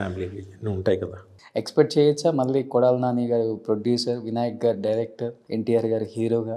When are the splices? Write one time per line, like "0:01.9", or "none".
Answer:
0:01.4
0:05.4